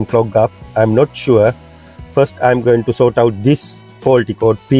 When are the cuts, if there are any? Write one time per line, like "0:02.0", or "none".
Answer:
none